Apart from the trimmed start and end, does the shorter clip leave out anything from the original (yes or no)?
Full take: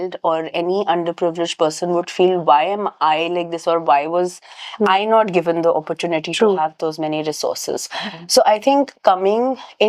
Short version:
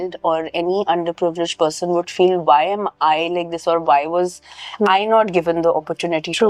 no